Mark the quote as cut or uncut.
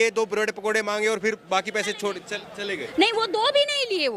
uncut